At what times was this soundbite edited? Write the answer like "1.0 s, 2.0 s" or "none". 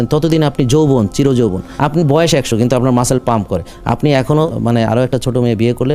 1.7 s, 4.5 s